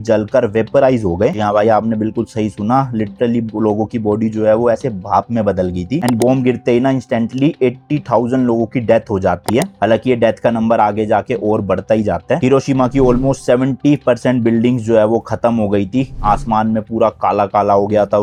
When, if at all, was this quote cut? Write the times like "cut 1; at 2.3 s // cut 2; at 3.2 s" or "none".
none

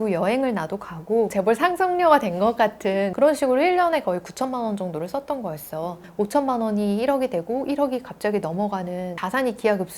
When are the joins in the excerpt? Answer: cut 1; at 1.3 s // cut 2; at 3.1 s // cut 3; at 6.0 s

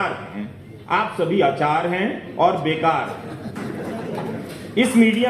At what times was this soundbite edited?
none

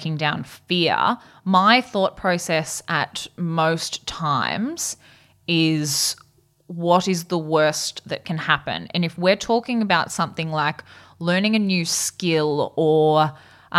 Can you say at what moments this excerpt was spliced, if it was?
none

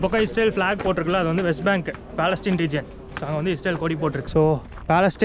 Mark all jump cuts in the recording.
cut 1; at 4.3 s

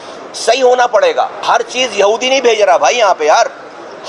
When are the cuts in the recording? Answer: cut 1; at 1.5 s

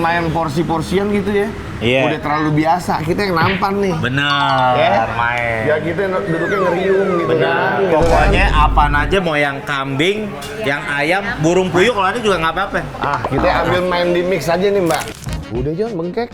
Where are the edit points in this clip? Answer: cut 1; at 15.1 s

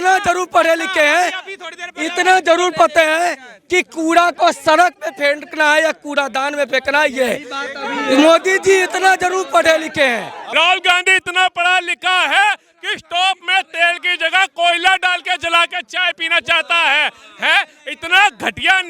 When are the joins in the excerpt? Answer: cut 1; at 10.4 s

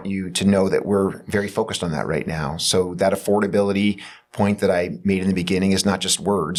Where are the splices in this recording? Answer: none

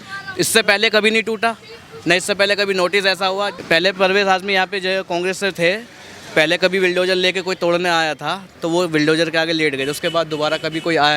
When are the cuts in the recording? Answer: cut 1; at 3.5 s // cut 2; at 8.5 s

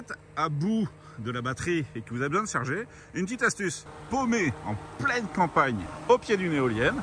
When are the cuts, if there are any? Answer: cut 1; at 3.9 s // cut 2; at 5.9 s

